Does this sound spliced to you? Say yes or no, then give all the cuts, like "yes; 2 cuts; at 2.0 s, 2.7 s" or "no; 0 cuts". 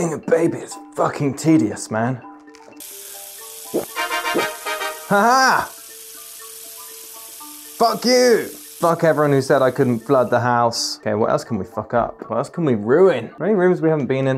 no; 0 cuts